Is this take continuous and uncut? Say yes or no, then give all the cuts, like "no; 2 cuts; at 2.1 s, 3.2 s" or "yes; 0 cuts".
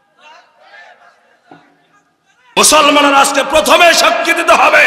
no; 1 cut; at 2.4 s